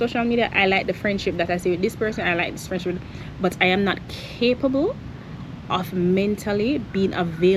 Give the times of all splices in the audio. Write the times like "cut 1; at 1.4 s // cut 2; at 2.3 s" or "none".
none